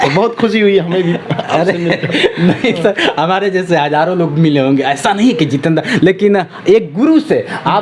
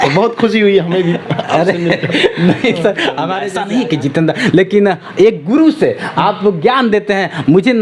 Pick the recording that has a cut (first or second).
second